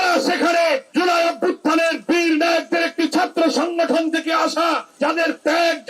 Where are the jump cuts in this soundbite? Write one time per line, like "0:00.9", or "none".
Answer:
0:00.9
0:04.9